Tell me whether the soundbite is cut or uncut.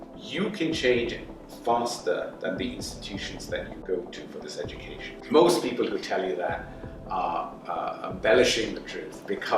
cut